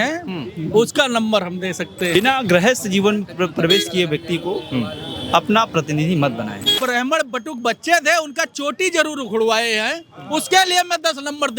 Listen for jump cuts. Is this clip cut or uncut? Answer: cut